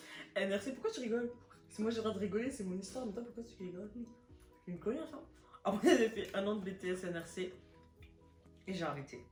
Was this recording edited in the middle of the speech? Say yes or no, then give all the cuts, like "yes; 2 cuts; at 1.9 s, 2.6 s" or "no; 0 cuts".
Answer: no; 0 cuts